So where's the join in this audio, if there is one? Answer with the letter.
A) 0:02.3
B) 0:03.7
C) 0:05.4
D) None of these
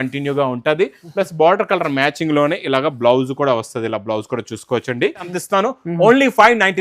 C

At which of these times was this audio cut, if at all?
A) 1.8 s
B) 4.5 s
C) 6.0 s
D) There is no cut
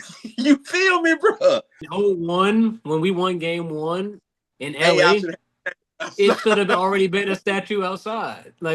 A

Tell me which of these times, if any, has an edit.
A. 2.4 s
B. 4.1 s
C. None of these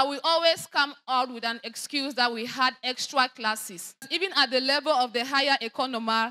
B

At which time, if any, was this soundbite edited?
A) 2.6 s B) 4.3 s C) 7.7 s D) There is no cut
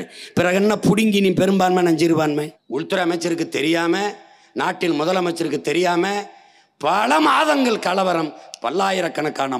A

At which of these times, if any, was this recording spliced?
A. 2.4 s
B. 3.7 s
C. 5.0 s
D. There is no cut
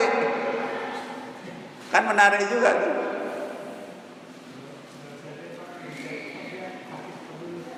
D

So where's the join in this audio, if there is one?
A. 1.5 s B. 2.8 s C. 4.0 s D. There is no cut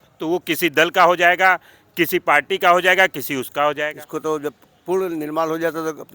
C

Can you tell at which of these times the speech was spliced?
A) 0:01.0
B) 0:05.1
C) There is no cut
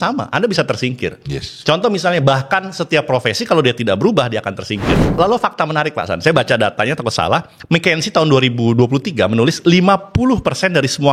B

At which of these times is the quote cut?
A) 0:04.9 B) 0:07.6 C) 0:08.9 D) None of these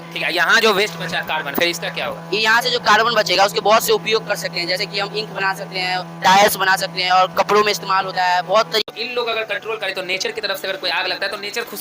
C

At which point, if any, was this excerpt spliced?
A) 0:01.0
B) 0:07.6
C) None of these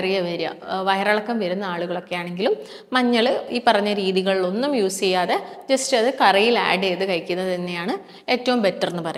C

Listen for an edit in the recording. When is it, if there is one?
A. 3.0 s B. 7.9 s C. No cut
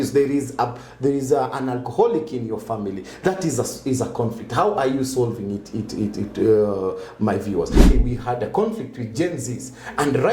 B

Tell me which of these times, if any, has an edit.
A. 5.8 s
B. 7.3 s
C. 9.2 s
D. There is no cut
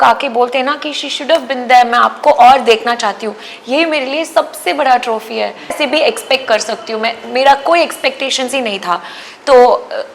A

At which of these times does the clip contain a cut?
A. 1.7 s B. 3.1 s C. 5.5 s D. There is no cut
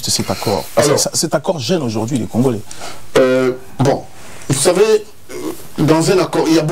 D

